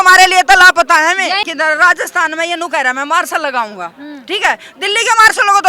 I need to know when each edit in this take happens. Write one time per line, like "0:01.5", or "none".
0:01.5